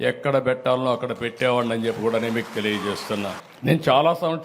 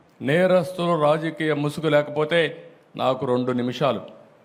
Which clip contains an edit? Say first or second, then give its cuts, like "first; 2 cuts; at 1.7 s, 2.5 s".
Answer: first; 1 cut; at 3.5 s